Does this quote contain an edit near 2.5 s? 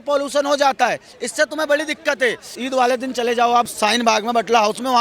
yes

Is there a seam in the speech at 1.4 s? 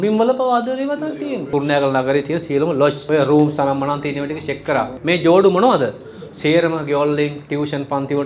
yes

